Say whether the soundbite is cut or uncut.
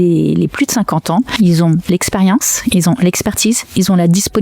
cut